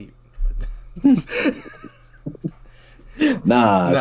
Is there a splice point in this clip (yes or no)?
no